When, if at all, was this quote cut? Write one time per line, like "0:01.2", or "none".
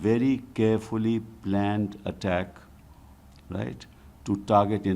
none